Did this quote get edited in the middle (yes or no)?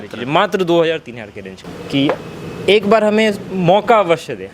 yes